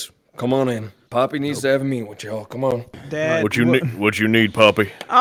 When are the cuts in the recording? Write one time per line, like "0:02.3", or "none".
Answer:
0:00.9
0:03.0